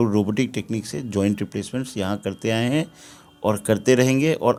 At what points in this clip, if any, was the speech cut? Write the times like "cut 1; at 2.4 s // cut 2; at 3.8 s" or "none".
none